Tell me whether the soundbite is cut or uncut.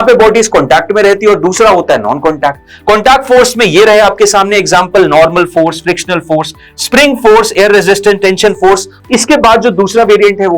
cut